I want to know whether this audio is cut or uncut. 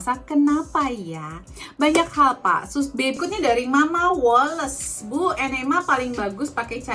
cut